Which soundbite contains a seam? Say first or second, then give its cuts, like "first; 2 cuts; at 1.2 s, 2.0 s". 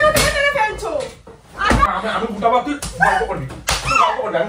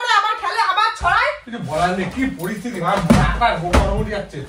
first; 1 cut; at 1.9 s